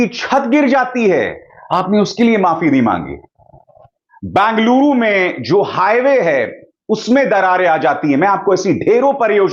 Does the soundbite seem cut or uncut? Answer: uncut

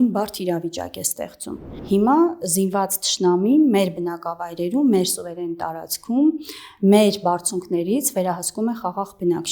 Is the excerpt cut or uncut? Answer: cut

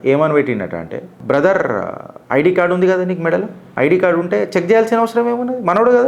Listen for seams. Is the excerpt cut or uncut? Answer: uncut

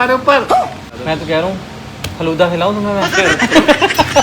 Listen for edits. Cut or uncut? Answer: cut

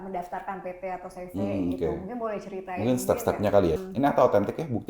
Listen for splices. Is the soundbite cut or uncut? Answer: cut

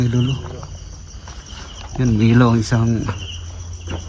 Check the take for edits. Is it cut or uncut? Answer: uncut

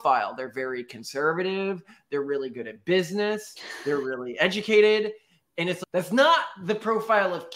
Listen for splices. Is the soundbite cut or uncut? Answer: uncut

